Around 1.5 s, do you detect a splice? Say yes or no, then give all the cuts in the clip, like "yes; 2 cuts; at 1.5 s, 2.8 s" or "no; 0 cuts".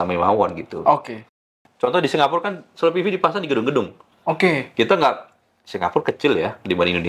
yes; 1 cut; at 1.5 s